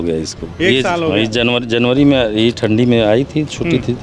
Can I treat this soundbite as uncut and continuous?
yes; 0 cuts

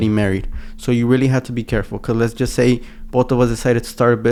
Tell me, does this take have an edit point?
no; 0 cuts

